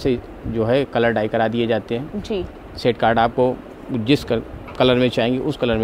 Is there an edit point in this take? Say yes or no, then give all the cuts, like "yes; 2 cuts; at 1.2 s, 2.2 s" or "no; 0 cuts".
no; 0 cuts